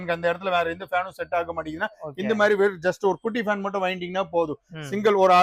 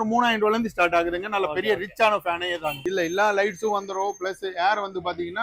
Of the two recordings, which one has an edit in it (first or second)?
second